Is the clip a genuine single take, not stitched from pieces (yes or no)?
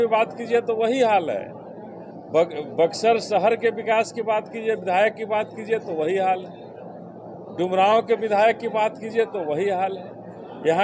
yes